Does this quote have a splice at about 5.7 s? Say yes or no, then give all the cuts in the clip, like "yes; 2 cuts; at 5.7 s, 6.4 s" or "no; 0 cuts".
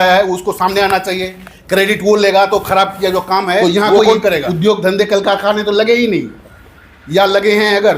no; 1 cut; at 4.4 s